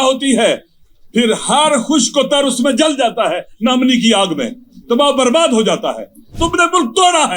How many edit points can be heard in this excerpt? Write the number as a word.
one